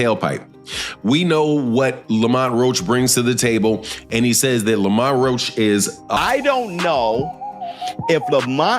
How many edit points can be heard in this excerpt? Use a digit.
1